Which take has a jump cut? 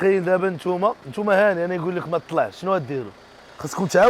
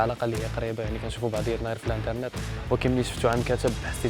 first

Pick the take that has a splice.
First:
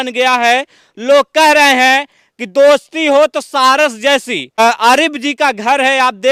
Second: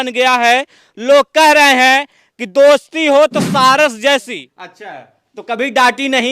second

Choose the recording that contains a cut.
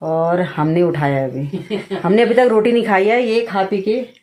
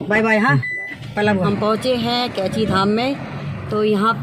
second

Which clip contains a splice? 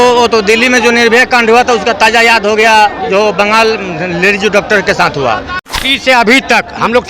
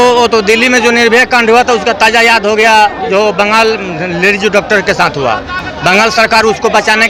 first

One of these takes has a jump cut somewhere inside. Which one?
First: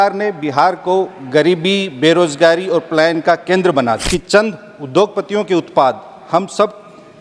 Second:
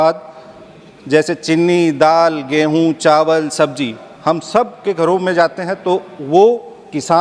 first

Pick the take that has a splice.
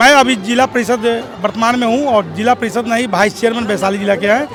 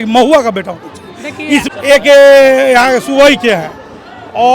second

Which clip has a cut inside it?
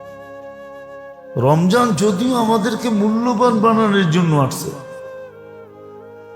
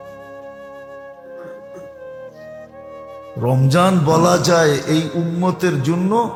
first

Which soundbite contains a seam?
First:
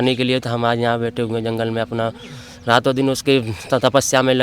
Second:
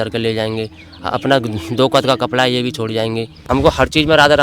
second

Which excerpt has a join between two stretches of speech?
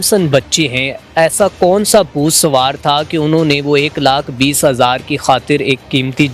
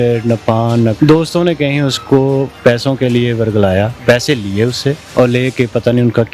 second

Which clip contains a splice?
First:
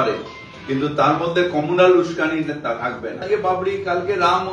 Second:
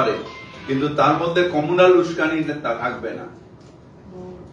first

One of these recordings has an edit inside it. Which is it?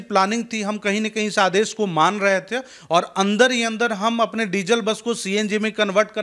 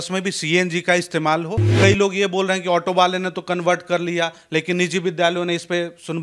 second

